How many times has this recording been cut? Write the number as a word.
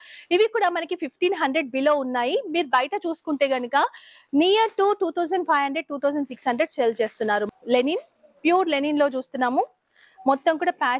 one